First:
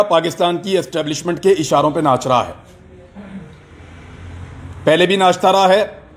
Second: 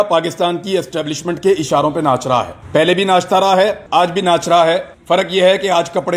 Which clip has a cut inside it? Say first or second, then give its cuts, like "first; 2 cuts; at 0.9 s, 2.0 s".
second; 3 cuts; at 2.6 s, 3.8 s, 4.9 s